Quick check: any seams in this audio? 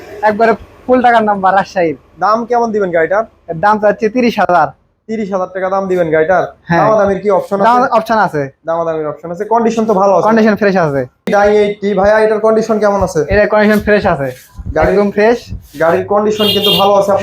yes; 1 cut; at 11.3 s

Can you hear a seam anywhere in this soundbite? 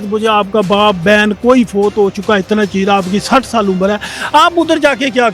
no; 0 cuts

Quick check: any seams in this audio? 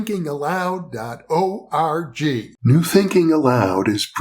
yes; 1 cut; at 2.5 s

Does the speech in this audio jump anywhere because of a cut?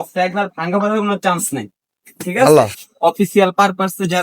yes; 1 cut; at 2.8 s

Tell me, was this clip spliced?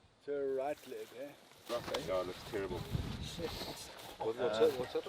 yes; 1 cut; at 1.6 s

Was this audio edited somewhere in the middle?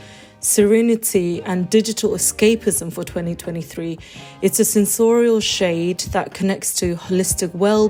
no; 0 cuts

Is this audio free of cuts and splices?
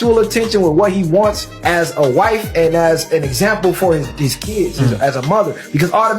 no; 1 cut; at 5.0 s

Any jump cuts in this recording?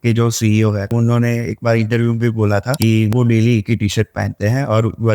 yes; 2 cuts; at 0.9 s, 3.1 s

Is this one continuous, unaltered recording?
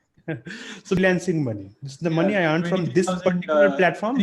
no; 1 cut; at 1.0 s

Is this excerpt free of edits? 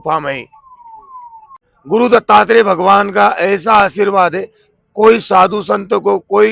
no; 1 cut; at 1.7 s

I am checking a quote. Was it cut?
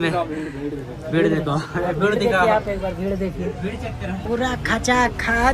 yes; 1 cut; at 4.2 s

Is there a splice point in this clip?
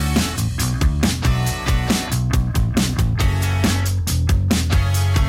yes; 1 cut; at 2.0 s

